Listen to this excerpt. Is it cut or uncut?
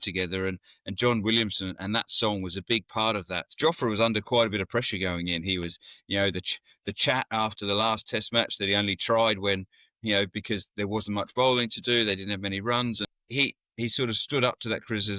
cut